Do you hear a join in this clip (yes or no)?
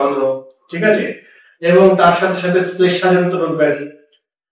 no